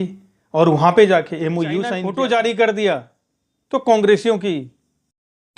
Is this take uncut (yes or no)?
no